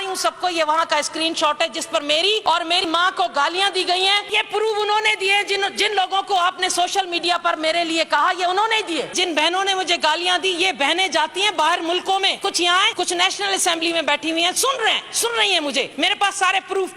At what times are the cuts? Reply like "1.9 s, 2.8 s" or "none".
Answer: 2.4 s, 4.3 s, 9.1 s, 12.7 s, 15.9 s